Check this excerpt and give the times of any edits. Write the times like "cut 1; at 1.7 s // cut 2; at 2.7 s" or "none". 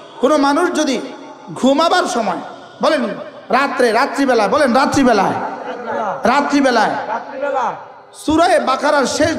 none